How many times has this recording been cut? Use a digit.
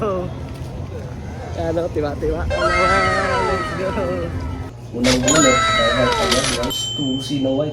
2